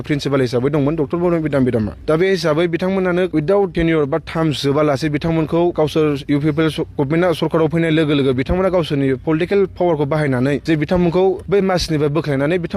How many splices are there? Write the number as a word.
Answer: five